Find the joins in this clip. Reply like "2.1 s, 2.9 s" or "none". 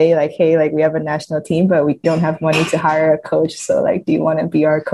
2.0 s

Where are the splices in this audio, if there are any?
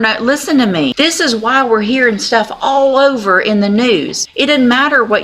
0.9 s, 4.2 s

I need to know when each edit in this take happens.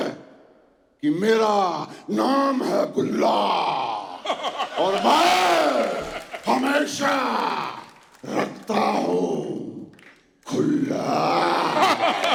none

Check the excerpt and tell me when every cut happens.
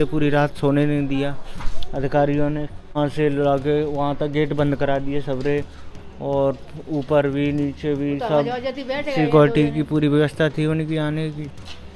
3.0 s

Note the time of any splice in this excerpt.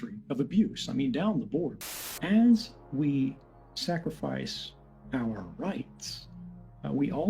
1.8 s

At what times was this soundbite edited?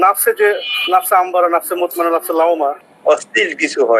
2.9 s

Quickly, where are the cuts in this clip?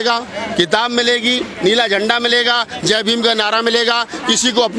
none

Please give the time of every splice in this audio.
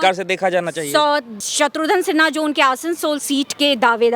1.4 s

